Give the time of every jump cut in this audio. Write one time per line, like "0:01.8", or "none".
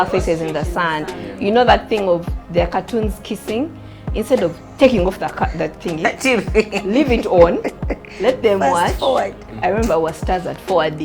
0:09.4